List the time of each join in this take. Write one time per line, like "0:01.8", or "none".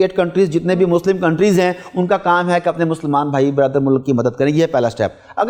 none